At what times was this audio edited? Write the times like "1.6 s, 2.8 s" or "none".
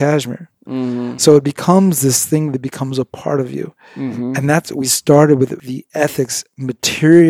5.6 s